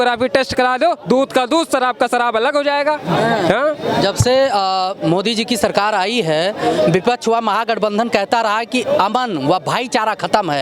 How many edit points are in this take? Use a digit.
0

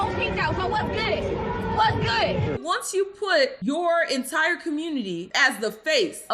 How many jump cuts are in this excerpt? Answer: 1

